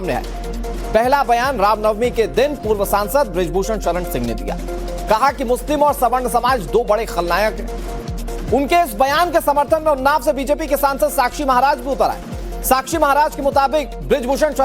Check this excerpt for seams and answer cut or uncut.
cut